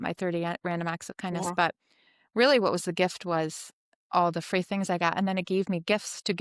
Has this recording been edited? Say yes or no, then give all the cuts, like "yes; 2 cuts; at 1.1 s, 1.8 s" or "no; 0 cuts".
no; 0 cuts